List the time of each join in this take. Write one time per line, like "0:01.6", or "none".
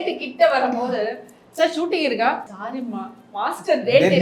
0:02.5